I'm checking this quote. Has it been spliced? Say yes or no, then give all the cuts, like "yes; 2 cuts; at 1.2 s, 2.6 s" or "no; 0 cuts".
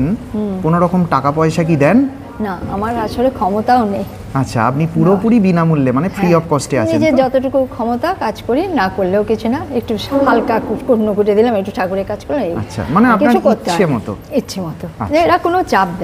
no; 0 cuts